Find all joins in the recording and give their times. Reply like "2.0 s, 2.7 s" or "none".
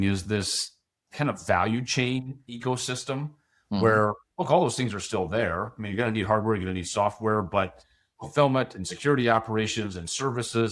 8.1 s